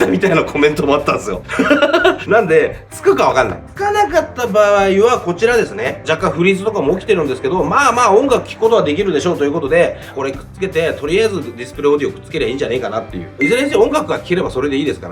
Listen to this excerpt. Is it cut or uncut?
uncut